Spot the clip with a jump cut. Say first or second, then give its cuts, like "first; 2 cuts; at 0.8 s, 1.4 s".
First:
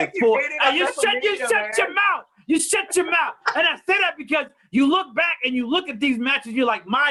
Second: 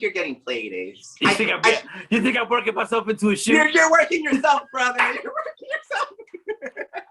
second; 1 cut; at 1.0 s